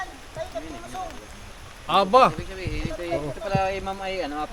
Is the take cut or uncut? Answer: uncut